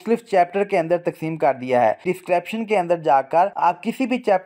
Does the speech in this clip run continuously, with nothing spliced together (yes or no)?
no